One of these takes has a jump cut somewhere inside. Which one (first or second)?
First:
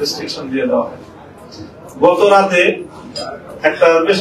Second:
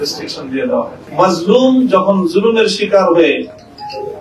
second